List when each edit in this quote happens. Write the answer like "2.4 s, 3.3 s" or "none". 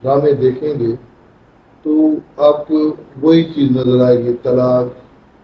none